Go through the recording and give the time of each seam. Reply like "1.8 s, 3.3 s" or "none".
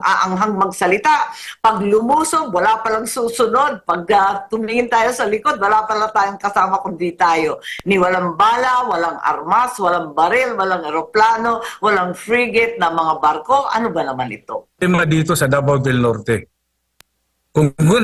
14.8 s